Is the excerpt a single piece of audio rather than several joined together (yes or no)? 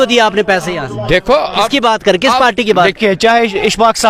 no